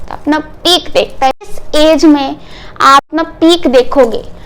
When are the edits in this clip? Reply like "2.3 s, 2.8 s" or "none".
1.5 s, 3.1 s